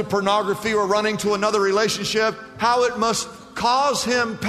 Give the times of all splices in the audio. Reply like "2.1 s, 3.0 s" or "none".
none